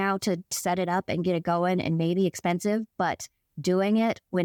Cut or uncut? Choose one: uncut